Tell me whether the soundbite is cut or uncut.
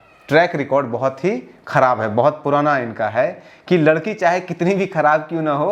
uncut